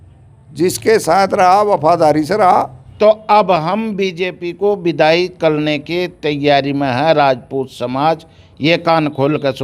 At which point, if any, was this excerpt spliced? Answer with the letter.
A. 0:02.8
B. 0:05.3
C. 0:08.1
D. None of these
A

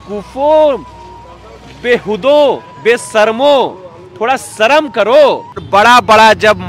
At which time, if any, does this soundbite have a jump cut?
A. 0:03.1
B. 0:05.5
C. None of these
B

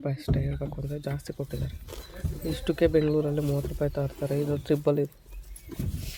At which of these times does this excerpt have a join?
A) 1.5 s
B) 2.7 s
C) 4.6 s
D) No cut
D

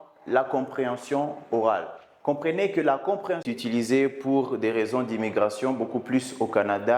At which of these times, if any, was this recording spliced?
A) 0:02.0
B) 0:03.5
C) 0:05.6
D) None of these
B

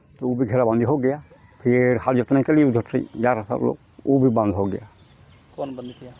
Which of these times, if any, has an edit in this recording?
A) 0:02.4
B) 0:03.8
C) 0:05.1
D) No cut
D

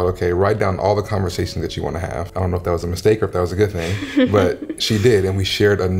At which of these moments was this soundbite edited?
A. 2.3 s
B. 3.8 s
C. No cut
A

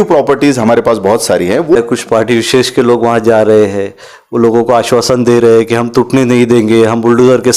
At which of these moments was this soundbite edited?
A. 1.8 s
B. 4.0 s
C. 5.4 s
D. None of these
A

